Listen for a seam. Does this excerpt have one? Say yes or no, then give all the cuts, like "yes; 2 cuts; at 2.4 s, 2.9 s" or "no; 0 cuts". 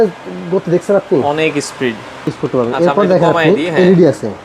yes; 1 cut; at 2.4 s